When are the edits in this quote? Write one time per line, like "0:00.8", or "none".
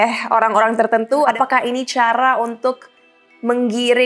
0:01.3